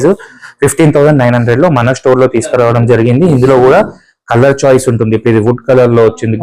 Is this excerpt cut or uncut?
uncut